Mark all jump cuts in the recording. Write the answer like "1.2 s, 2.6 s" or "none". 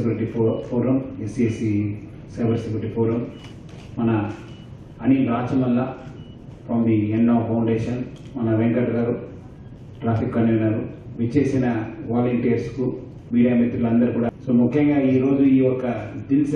14.3 s